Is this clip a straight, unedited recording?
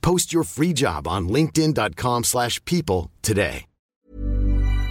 no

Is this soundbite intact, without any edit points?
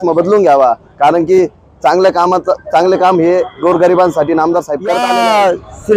no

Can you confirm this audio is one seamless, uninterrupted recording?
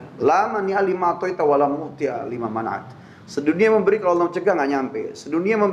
yes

